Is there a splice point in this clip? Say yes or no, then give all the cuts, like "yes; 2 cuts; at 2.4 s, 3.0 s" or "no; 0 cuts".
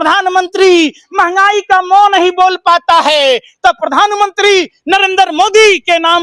no; 0 cuts